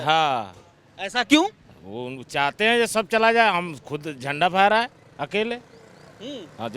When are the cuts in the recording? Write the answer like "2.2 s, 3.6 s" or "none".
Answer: none